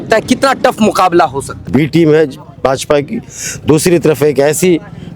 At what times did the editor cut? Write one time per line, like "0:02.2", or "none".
0:01.6